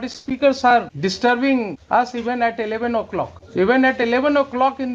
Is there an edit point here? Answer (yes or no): yes